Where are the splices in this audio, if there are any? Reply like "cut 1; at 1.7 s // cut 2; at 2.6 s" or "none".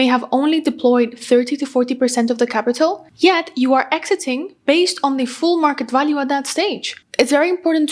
cut 1; at 6.9 s